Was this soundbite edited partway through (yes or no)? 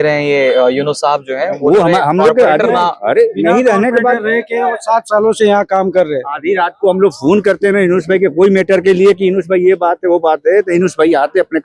no